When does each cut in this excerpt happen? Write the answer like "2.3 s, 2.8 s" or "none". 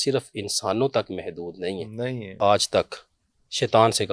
2.4 s

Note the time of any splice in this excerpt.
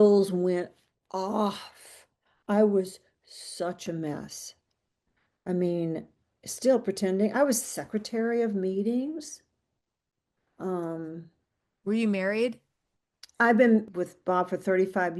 13.9 s

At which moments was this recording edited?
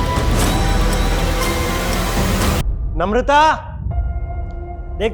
2.6 s

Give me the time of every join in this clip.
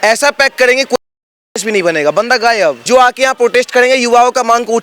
2.8 s

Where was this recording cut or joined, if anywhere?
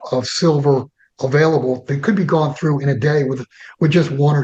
none

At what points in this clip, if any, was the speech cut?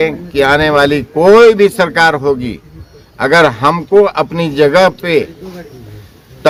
none

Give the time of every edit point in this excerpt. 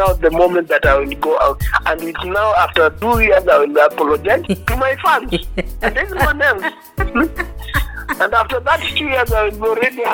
none

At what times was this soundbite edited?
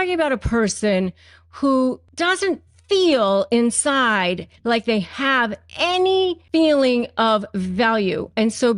2.1 s, 6.4 s

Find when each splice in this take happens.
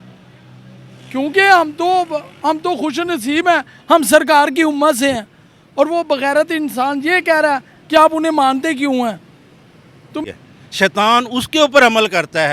10.2 s

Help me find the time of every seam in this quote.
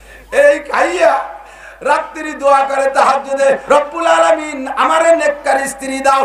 3.6 s

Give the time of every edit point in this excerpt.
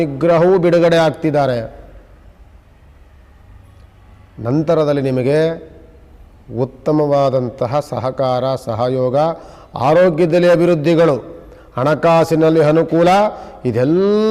none

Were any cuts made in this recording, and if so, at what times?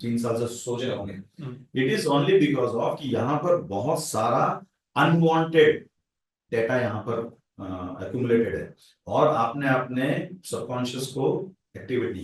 none

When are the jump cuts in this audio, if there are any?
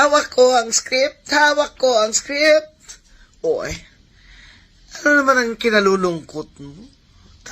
6.5 s

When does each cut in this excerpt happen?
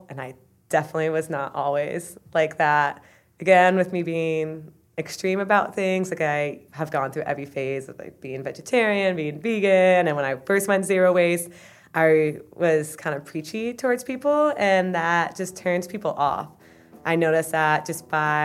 2.1 s, 6.6 s

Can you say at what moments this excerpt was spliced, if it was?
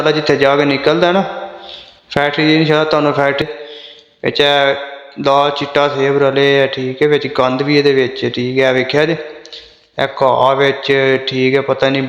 3.4 s

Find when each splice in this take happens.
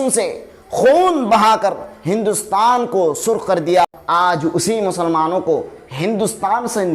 4.0 s

